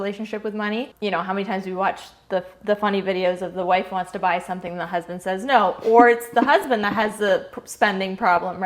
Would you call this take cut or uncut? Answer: cut